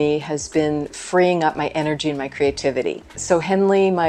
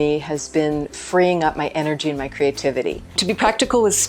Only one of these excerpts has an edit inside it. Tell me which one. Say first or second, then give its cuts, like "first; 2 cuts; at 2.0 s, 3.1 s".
second; 1 cut; at 3.2 s